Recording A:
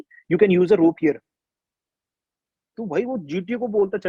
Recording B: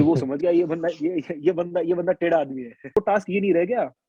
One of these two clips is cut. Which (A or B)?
B